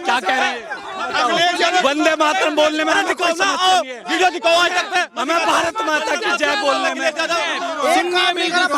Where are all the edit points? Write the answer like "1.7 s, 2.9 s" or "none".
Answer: 0.9 s, 7.5 s